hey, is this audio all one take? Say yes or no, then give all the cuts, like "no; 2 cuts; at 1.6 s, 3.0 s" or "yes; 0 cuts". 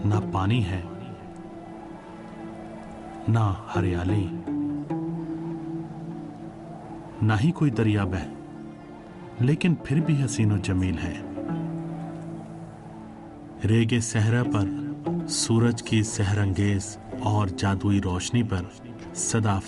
no; 1 cut; at 8.3 s